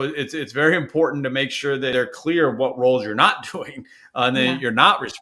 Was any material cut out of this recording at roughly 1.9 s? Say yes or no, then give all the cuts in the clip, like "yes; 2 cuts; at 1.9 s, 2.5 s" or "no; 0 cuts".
yes; 1 cut; at 1.9 s